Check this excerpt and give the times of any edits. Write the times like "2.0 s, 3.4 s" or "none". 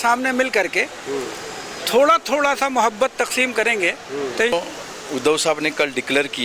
4.5 s

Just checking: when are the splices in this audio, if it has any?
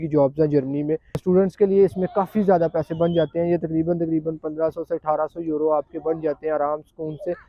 1.2 s

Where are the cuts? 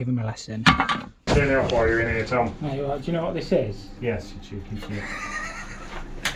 none

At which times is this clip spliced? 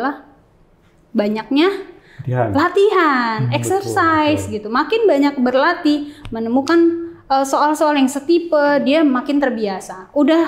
none

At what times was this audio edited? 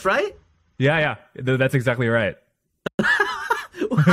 none

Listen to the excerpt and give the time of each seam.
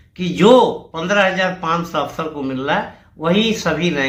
none

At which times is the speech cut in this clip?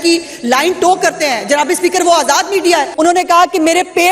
2.9 s

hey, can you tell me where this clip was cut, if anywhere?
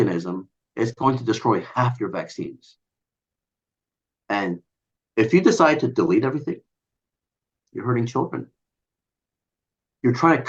none

